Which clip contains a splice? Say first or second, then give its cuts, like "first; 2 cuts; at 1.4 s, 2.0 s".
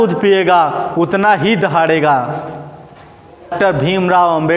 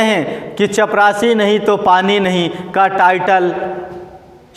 first; 1 cut; at 3.5 s